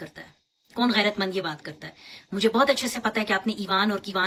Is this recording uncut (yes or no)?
yes